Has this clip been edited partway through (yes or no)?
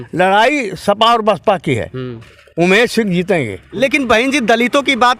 yes